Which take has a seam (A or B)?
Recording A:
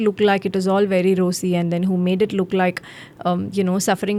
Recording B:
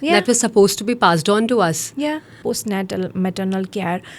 B